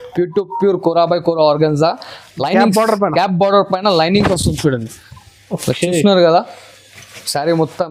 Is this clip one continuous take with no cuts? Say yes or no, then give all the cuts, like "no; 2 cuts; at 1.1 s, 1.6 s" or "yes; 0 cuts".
yes; 0 cuts